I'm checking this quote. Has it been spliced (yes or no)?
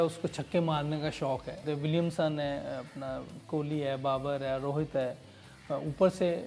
yes